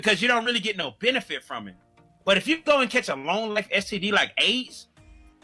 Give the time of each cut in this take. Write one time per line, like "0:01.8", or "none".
none